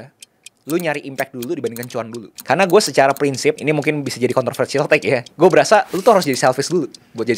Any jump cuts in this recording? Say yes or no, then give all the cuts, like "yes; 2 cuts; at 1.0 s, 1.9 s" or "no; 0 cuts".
yes; 2 cuts; at 2.3 s, 3.6 s